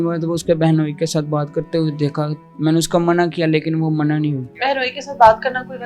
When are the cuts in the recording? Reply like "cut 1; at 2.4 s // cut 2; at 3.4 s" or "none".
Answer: cut 1; at 4.6 s